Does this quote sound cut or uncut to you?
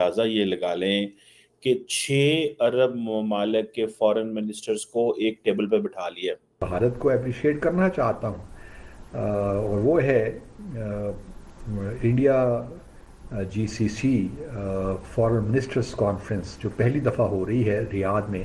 cut